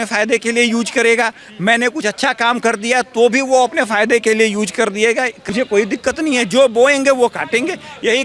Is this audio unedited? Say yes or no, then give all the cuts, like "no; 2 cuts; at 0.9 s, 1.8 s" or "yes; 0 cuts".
no; 1 cut; at 5.4 s